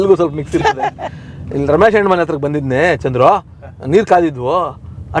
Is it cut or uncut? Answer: uncut